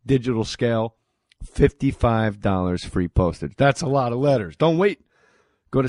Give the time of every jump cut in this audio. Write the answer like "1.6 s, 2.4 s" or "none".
none